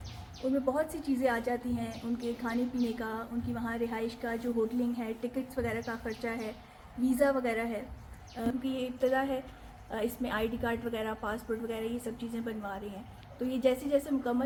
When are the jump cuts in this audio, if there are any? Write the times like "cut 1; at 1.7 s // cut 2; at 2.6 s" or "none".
none